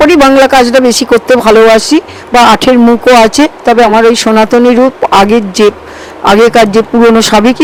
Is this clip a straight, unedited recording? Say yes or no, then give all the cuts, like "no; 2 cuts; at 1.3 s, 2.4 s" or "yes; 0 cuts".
yes; 0 cuts